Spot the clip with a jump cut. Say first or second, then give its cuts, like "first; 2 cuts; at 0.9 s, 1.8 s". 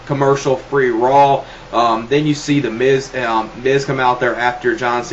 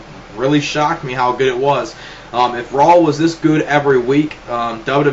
first; 1 cut; at 2.4 s